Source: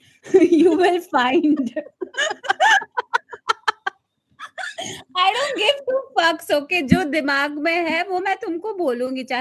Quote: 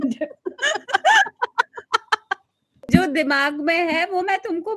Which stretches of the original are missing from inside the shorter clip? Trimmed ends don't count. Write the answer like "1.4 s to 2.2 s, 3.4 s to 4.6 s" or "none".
4.4 s to 6.9 s